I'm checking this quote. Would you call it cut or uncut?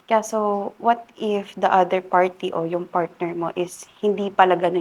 uncut